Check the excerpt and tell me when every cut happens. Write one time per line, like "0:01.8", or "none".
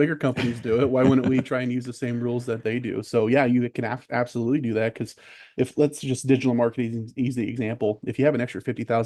none